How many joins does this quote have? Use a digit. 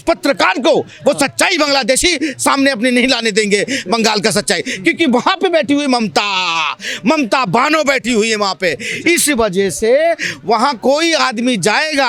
0